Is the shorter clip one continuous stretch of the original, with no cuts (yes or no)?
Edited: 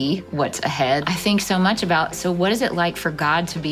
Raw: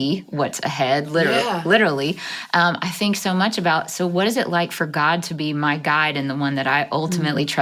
no